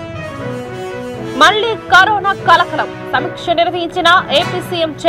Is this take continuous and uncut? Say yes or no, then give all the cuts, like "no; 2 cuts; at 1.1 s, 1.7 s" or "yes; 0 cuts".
no; 1 cut; at 0.9 s